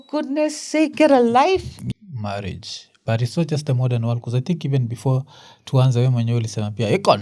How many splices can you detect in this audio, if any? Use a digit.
1